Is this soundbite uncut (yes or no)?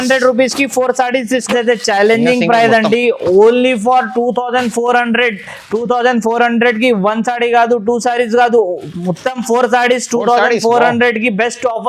no